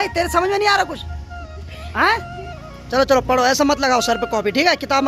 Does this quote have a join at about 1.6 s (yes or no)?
no